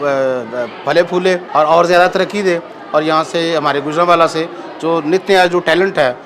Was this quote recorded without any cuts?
no; 1 cut; at 1.4 s

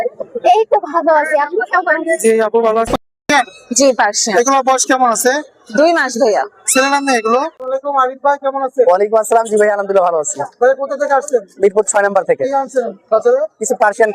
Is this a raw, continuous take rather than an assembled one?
no; 2 cuts; at 2.9 s, 7.6 s

